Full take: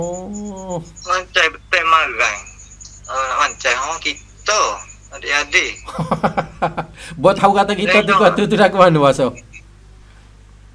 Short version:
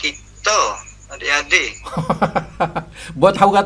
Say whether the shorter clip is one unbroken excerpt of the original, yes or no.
yes